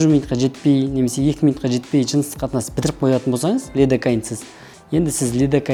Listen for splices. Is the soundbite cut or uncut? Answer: uncut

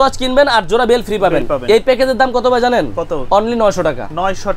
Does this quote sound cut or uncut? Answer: uncut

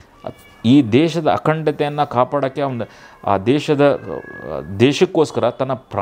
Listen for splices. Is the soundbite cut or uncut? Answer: uncut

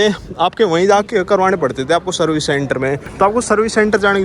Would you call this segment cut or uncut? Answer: cut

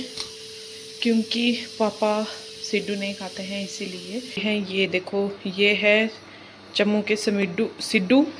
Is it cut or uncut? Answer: cut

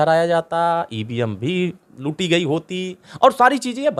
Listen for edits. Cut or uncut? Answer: uncut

